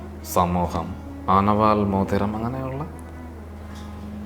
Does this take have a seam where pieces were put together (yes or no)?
yes